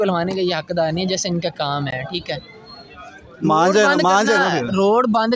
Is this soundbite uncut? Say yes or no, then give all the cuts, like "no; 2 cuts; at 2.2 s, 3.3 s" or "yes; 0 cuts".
yes; 0 cuts